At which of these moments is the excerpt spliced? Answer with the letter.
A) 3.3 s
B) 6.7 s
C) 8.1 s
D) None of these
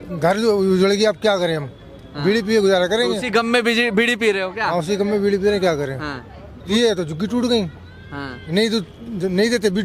B